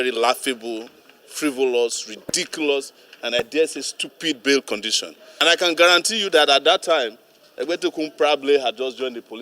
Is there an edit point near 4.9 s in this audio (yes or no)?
yes